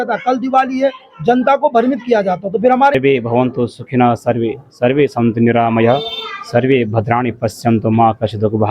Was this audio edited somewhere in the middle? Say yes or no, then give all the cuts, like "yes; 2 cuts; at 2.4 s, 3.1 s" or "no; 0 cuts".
yes; 1 cut; at 2.9 s